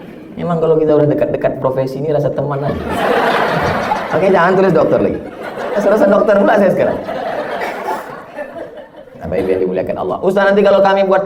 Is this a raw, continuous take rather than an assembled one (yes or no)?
yes